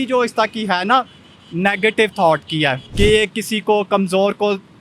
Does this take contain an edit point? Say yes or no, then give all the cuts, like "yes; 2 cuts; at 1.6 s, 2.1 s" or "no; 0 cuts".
yes; 1 cut; at 2.8 s